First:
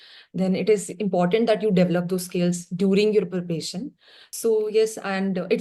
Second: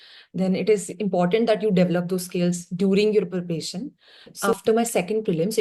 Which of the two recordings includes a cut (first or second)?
second